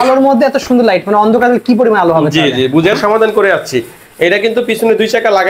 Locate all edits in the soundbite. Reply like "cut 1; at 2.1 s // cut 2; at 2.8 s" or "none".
cut 1; at 3.0 s

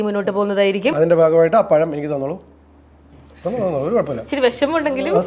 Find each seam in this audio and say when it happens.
none

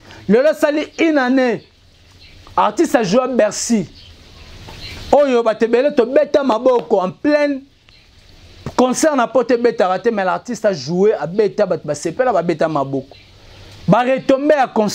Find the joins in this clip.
none

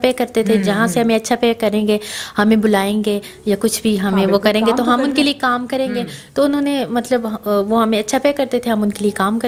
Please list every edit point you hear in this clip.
none

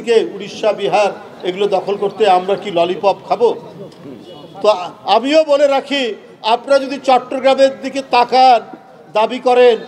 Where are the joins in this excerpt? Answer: none

